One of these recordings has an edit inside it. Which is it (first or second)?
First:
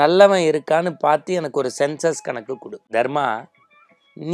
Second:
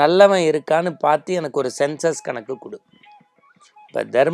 first